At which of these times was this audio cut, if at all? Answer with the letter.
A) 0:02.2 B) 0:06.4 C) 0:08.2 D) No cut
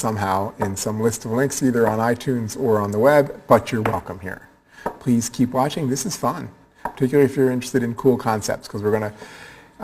B